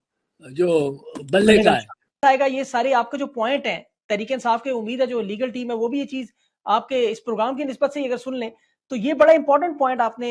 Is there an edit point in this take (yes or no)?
yes